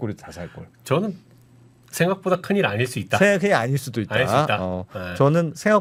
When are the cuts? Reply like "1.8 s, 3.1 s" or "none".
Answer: none

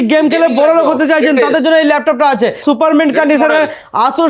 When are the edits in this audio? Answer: 2.6 s

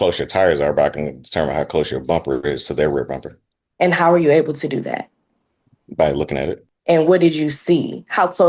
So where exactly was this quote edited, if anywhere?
none

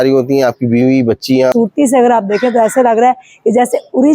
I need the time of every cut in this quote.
1.5 s

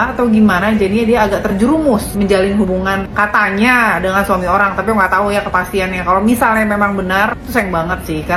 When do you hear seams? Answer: none

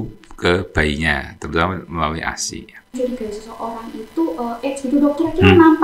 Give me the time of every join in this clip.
2.9 s

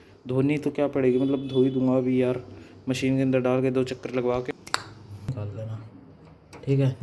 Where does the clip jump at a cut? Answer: 5.3 s

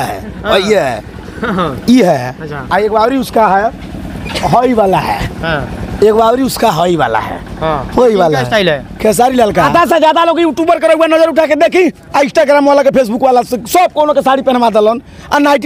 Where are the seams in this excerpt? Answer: 9.7 s

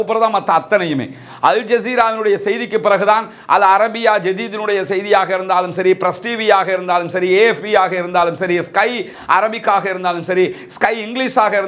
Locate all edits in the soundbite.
none

